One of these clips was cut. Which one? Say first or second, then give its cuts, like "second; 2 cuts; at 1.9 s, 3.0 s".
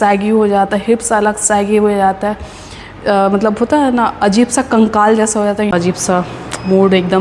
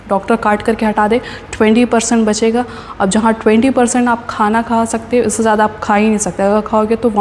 first; 1 cut; at 5.7 s